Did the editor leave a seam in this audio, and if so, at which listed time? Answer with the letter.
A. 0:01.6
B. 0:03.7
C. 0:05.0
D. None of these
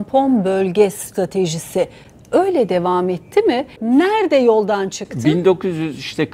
B